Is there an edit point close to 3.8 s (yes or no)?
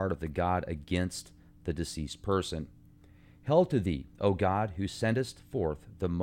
yes